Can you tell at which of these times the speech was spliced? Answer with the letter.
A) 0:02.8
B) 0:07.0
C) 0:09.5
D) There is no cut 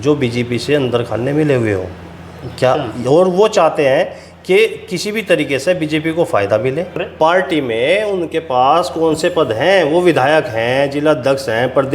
B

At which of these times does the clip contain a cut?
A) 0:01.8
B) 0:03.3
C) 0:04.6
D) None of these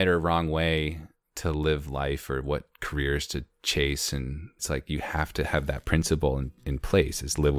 C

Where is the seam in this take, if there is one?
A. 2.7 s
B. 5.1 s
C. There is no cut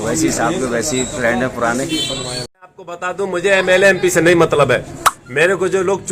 A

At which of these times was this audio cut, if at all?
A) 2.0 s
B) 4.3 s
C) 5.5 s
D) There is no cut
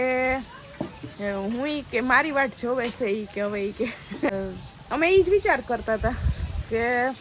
B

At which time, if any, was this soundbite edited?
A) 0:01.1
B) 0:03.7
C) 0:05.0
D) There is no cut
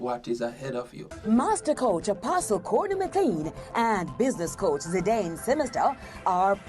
A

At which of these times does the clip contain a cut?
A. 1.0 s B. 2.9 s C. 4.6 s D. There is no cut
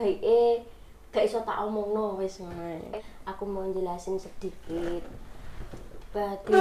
B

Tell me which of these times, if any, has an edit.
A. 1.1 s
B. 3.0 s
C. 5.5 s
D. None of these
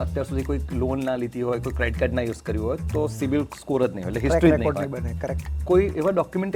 C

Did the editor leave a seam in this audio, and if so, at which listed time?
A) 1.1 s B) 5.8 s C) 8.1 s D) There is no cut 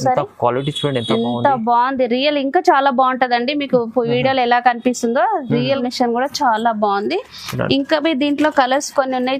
B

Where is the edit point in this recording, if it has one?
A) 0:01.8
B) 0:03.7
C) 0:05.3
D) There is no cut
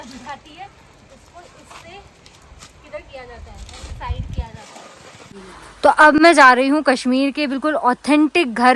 D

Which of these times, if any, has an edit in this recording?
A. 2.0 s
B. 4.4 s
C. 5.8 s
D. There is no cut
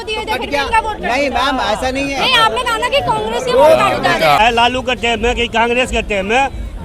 B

